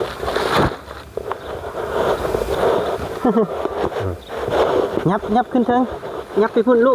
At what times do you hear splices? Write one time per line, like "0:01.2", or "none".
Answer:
0:02.5